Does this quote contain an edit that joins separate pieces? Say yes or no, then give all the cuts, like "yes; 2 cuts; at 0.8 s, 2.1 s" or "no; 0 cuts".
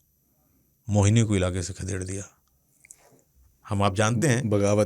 no; 0 cuts